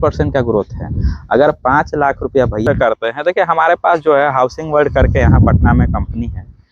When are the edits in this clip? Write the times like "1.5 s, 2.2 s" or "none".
2.6 s